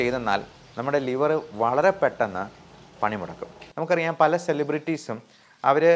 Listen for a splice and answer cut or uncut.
cut